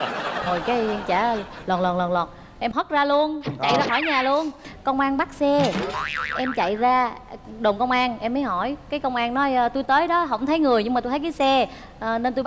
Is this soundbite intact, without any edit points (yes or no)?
no